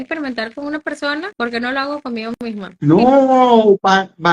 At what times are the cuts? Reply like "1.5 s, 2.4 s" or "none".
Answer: 1.3 s, 2.7 s